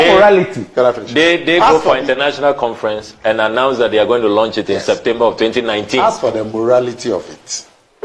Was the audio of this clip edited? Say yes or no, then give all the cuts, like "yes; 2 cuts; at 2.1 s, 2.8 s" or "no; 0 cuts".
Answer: no; 0 cuts